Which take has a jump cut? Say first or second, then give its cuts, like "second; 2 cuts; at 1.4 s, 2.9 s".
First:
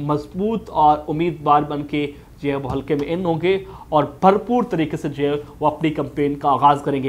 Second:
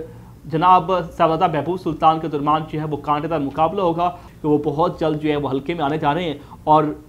second; 1 cut; at 4.3 s